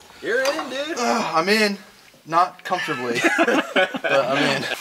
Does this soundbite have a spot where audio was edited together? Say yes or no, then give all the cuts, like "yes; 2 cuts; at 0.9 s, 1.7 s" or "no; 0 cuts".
no; 0 cuts